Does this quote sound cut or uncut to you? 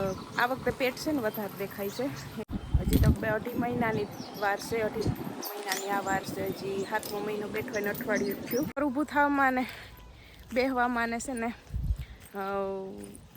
cut